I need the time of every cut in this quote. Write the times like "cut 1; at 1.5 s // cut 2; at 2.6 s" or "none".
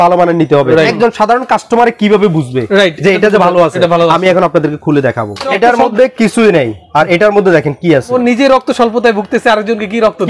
cut 1; at 0.9 s // cut 2; at 5.5 s // cut 3; at 8.1 s